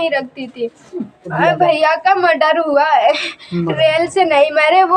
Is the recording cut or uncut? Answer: cut